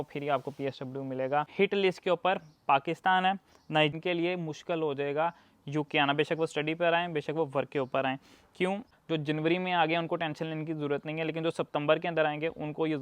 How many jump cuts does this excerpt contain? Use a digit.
3